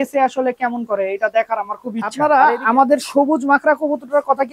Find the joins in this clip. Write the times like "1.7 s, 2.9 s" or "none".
none